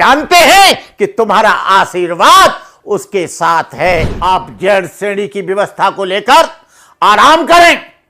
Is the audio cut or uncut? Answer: cut